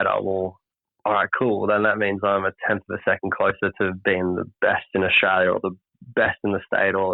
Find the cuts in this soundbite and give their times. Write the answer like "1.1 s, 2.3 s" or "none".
none